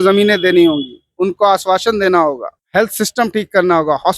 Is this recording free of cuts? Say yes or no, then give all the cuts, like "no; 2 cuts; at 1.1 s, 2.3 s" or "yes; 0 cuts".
no; 1 cut; at 2.5 s